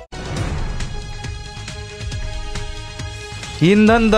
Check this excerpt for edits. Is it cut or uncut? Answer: uncut